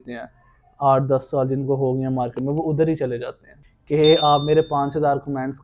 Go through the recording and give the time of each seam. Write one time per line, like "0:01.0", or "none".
0:03.5